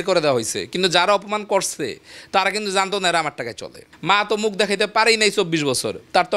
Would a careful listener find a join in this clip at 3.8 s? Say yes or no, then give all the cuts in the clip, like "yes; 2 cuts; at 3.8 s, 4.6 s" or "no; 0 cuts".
yes; 1 cut; at 3.8 s